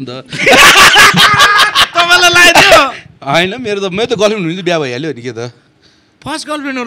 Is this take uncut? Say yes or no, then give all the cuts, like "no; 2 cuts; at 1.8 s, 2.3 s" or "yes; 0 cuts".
yes; 0 cuts